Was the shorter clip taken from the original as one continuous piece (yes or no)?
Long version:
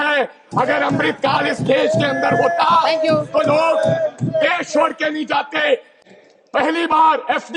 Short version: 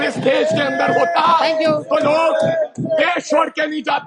yes